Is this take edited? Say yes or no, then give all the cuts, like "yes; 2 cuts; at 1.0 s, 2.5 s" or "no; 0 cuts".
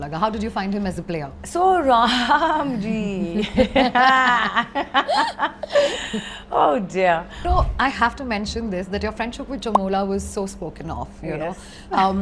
yes; 1 cut; at 7.4 s